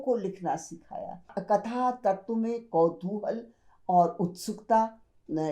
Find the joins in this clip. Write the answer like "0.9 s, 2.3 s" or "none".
1.4 s